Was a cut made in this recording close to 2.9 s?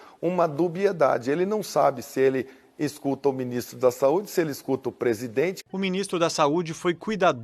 no; 1 cut; at 5.6 s

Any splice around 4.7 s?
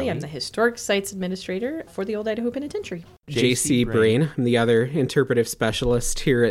no; 2 cuts; at 1.9 s, 3.3 s

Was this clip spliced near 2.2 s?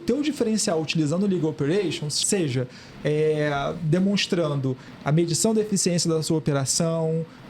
yes; 1 cut; at 2.2 s

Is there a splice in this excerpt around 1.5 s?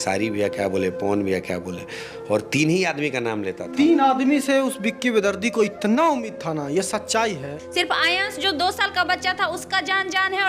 no; 1 cut; at 7.6 s

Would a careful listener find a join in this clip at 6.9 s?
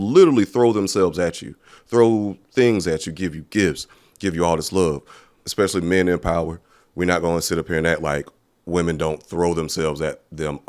no; 1 cut; at 5.4 s

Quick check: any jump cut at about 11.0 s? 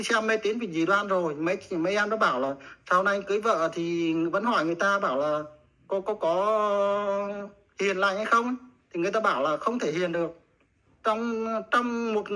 no; 0 cuts

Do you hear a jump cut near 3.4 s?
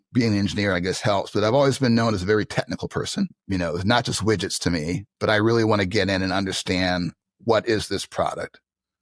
yes; 1 cut; at 3.4 s

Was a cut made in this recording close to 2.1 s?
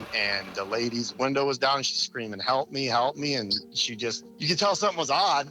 no; 1 cut; at 4.3 s

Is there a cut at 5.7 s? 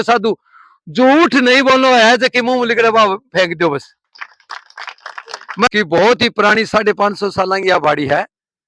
yes; 1 cut; at 5.7 s

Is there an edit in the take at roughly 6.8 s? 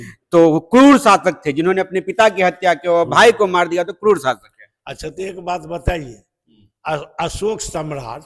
no; 0 cuts

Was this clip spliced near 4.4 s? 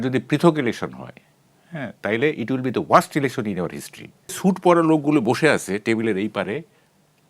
yes; 1 cut; at 4.4 s

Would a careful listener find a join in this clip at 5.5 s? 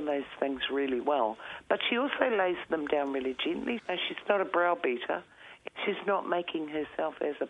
yes; 2 cuts; at 3.8 s, 5.5 s

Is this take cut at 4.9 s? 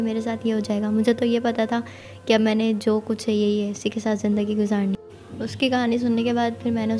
yes; 1 cut; at 4.9 s

